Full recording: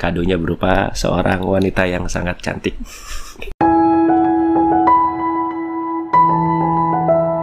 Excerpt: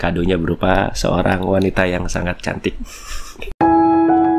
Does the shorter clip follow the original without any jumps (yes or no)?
yes